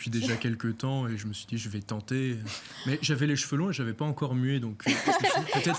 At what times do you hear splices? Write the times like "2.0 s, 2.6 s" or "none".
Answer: none